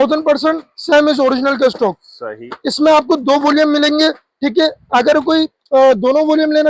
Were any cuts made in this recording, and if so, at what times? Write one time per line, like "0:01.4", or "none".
none